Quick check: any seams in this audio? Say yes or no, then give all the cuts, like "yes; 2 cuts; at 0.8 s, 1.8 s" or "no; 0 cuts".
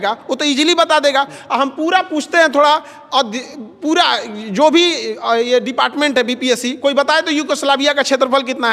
no; 0 cuts